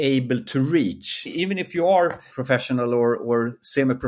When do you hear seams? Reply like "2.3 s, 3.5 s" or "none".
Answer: 1.2 s, 2.3 s